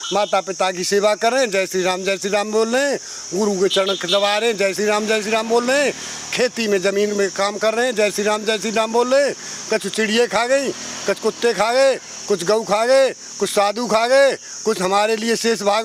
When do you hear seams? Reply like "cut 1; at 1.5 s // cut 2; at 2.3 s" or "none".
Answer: none